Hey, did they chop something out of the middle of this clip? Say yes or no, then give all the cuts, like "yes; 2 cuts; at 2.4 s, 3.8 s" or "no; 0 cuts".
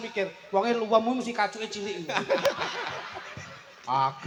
no; 0 cuts